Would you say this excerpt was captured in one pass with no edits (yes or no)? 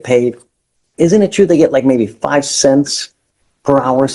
yes